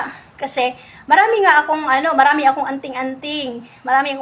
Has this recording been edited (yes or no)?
no